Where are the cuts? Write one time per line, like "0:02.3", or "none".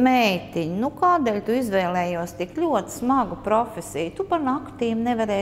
none